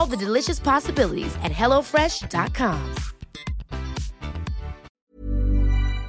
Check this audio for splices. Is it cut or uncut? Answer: cut